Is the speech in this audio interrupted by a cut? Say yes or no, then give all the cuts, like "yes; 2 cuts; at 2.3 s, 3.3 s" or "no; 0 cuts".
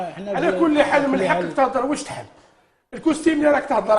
yes; 1 cut; at 2.6 s